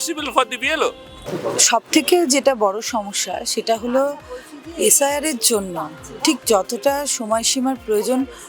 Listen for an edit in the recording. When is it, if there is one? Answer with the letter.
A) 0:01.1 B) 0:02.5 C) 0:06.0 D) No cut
D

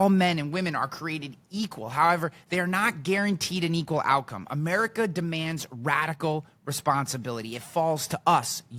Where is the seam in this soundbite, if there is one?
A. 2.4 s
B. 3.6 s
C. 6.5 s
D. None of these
D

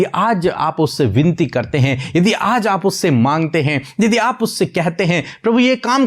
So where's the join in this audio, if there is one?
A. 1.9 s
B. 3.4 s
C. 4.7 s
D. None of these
D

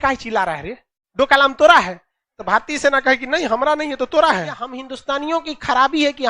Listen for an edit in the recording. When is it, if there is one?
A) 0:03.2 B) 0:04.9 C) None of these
B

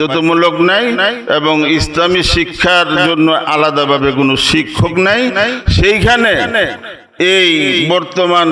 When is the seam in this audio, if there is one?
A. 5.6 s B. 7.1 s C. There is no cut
C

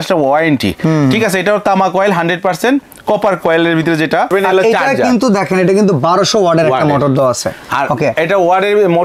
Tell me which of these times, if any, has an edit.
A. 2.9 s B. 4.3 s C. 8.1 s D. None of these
B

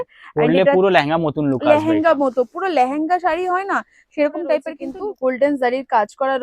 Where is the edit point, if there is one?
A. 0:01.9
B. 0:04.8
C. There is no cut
B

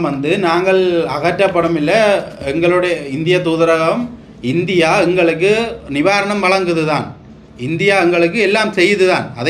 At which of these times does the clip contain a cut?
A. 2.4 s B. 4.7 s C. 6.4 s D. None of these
D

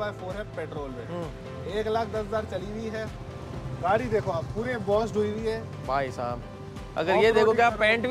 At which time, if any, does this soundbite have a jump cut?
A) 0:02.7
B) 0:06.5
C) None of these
C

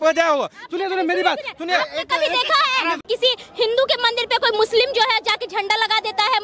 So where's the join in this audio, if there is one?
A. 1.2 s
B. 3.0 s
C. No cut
B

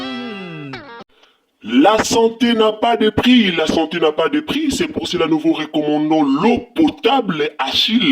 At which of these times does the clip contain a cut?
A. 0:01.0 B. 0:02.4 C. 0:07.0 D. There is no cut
A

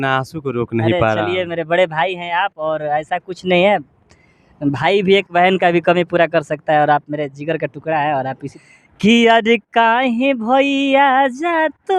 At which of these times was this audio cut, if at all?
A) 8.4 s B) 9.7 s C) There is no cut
A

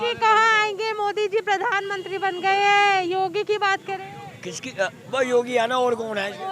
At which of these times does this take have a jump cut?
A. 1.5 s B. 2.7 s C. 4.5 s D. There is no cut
D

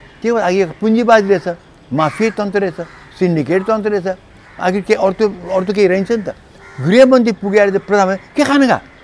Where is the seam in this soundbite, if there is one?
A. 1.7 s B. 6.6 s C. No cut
B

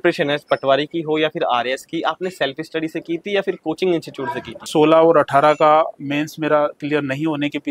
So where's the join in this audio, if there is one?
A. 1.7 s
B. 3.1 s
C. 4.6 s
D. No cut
C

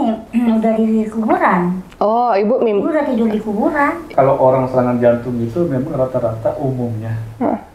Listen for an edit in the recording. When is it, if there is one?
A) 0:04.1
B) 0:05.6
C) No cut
A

